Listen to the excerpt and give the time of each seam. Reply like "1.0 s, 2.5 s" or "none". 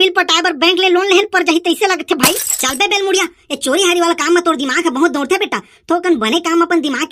2.6 s